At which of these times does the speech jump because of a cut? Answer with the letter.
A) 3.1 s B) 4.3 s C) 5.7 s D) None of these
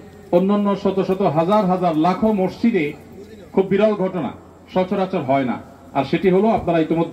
D